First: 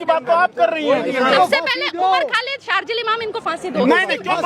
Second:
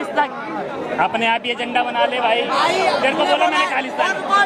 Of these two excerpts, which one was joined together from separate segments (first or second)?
first